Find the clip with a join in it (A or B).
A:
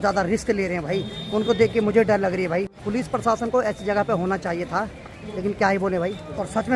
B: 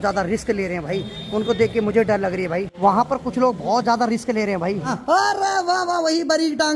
B